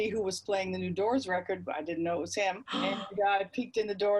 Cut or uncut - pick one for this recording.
cut